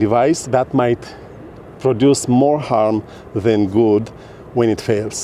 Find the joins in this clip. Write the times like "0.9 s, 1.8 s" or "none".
none